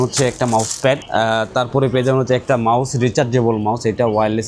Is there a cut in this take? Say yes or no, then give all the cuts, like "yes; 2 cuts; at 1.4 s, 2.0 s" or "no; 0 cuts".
no; 0 cuts